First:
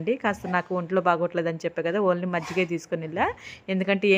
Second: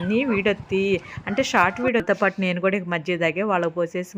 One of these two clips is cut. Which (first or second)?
second